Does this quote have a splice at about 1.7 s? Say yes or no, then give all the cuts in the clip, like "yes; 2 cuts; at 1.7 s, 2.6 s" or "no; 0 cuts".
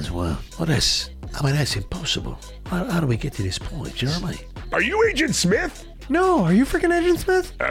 no; 1 cut; at 4.9 s